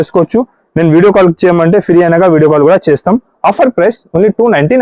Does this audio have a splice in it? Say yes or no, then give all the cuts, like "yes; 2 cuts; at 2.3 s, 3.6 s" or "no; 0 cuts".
no; 0 cuts